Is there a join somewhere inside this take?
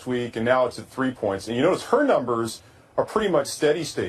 no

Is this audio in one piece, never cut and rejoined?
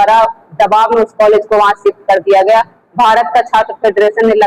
yes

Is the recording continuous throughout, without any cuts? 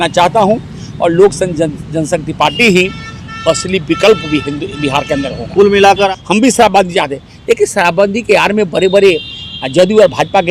no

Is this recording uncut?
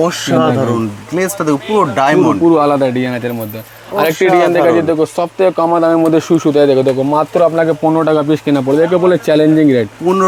yes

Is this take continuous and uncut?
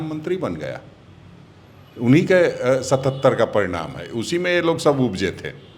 yes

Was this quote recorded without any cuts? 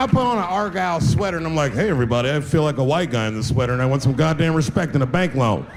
yes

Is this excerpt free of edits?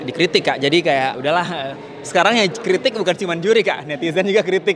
yes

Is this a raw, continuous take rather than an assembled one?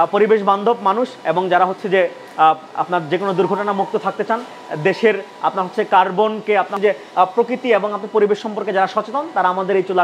yes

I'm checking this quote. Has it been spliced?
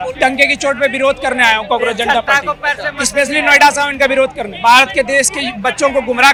no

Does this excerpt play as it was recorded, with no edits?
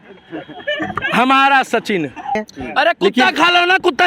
no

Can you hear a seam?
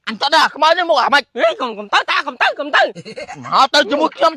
no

